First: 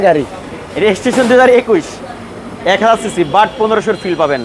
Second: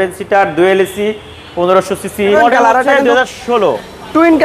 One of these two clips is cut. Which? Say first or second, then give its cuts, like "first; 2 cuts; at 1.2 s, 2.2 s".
second; 2 cuts; at 1.4 s, 2.4 s